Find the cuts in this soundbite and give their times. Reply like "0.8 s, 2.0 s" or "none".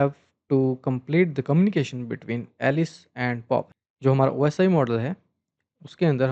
3.7 s